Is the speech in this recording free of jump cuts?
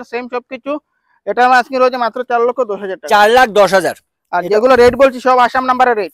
yes; 0 cuts

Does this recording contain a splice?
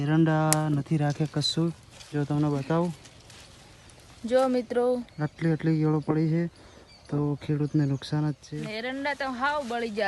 yes; 1 cut; at 8.5 s

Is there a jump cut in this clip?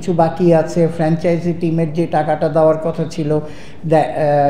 no; 0 cuts

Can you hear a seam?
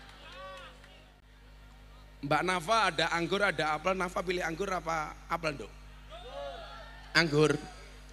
yes; 1 cut; at 1.1 s

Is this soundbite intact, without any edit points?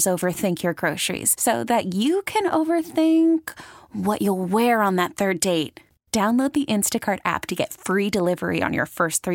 yes; 0 cuts

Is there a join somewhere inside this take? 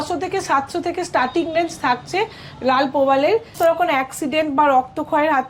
yes; 1 cut; at 3.5 s

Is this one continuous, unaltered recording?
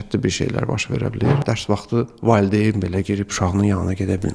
no; 1 cut; at 1.4 s

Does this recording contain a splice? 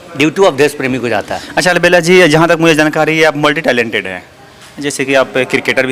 no; 0 cuts

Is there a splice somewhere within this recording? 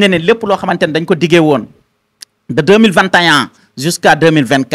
no; 0 cuts

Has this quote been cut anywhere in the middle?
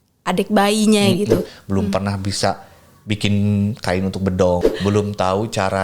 yes; 2 cuts; at 1.5 s, 4.7 s

